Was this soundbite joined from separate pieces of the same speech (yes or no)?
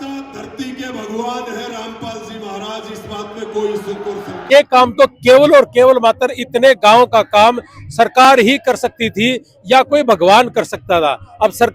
yes